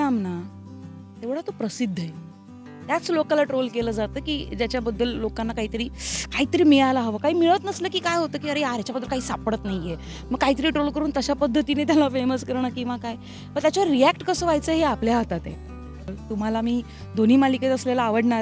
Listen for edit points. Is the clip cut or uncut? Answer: cut